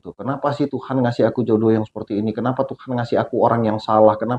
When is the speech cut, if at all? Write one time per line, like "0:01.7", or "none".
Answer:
none